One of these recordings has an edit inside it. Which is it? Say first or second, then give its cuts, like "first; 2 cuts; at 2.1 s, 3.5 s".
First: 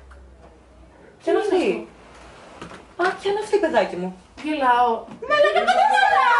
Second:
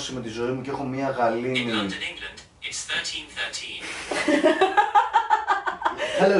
first; 1 cut; at 5.2 s